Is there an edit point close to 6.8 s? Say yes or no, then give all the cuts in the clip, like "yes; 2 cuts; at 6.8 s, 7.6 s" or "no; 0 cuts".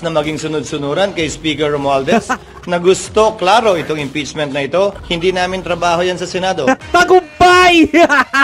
yes; 2 cuts; at 5.0 s, 6.8 s